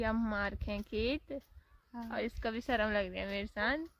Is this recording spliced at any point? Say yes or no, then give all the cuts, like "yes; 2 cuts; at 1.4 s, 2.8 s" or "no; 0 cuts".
no; 0 cuts